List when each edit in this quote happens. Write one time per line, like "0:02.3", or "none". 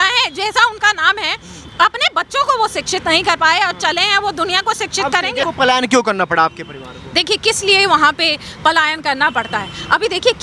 0:05.5